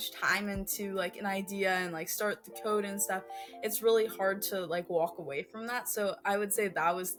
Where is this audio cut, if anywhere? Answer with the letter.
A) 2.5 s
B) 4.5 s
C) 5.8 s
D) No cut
D